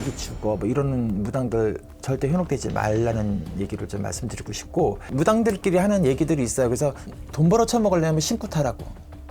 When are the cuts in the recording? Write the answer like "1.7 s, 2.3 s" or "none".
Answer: 1.9 s, 5.1 s

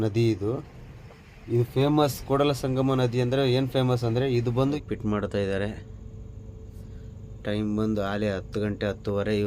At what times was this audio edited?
4.8 s

